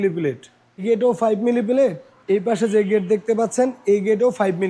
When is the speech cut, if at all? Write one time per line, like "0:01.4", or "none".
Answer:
0:00.8
0:02.1